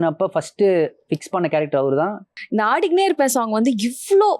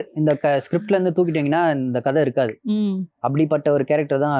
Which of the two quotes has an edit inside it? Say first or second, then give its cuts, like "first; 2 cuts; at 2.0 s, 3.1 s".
first; 1 cut; at 2.3 s